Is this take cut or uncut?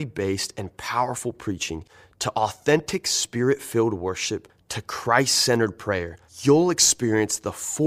uncut